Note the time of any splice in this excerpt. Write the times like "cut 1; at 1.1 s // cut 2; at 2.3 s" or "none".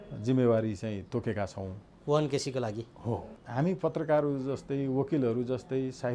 cut 1; at 3.4 s